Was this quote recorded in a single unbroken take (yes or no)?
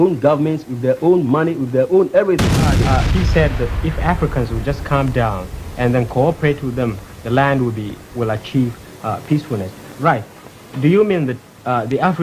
no